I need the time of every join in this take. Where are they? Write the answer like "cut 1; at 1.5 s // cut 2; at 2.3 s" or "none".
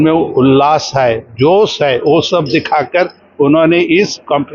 none